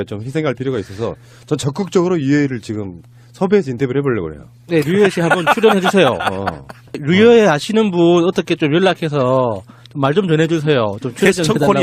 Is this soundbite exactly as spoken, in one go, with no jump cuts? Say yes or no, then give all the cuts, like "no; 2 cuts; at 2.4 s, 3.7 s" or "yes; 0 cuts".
yes; 0 cuts